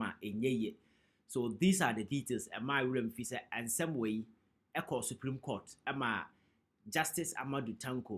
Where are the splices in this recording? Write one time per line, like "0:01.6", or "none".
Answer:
0:07.0